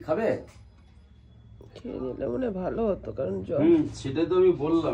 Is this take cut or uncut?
uncut